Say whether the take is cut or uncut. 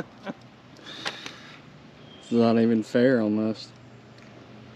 uncut